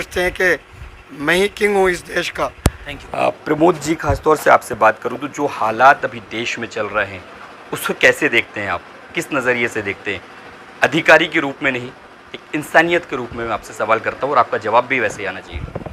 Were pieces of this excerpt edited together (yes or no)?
yes